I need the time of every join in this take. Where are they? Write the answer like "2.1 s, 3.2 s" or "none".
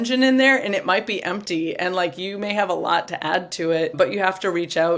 3.9 s